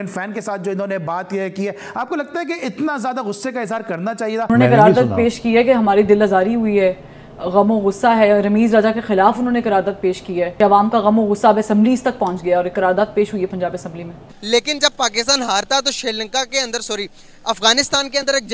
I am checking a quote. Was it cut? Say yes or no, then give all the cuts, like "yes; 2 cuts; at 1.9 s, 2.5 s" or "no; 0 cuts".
yes; 3 cuts; at 4.5 s, 10.5 s, 14.7 s